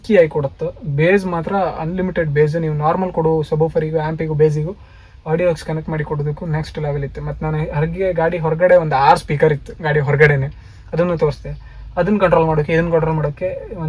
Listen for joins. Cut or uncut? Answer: uncut